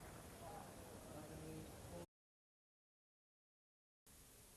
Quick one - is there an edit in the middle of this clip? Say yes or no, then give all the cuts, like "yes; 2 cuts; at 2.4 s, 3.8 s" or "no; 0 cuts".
no; 0 cuts